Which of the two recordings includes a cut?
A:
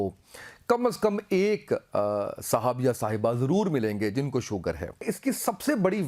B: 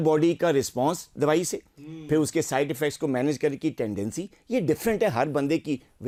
A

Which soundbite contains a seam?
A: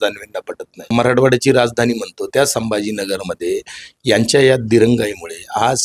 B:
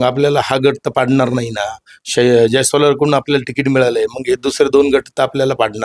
A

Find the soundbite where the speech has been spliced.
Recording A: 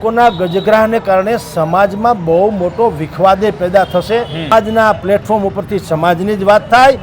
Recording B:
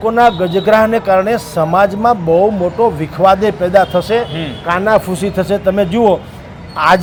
A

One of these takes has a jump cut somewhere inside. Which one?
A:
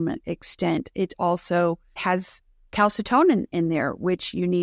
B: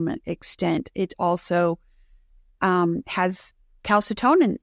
A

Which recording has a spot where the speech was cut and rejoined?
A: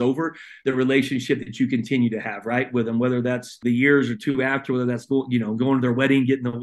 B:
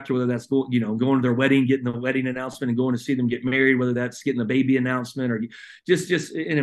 A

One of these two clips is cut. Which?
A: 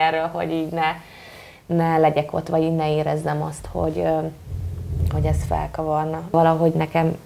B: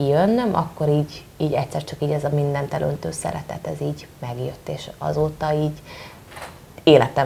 A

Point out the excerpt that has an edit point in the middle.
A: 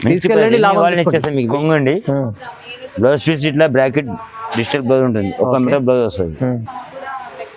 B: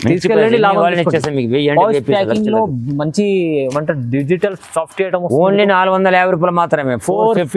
A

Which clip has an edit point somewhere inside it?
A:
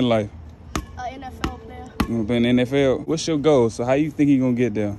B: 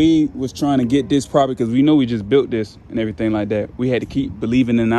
A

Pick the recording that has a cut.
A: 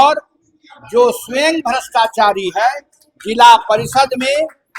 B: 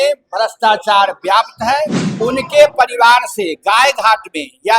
B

